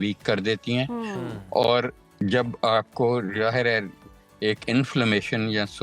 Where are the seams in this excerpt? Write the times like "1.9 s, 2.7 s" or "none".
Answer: none